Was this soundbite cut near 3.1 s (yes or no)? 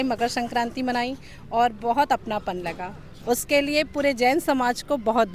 no